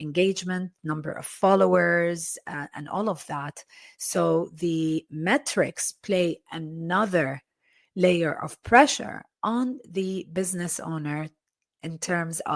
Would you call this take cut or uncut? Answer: uncut